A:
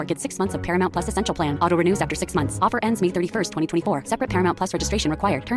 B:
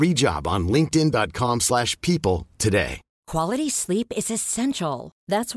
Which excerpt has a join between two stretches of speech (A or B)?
B